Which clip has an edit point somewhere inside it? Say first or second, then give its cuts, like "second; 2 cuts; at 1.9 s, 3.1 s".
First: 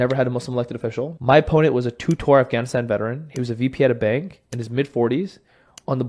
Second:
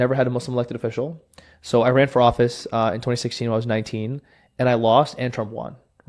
first; 1 cut; at 1.1 s